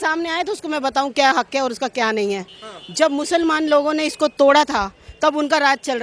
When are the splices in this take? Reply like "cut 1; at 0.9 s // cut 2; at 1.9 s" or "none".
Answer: cut 1; at 2.6 s